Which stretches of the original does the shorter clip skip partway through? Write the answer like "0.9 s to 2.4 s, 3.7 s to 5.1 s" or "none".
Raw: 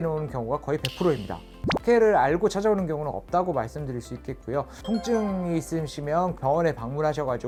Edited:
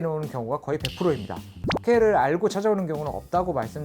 none